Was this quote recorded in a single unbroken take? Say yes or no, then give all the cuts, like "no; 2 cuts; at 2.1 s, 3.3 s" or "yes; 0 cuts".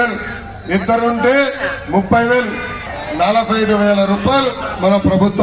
no; 1 cut; at 2.7 s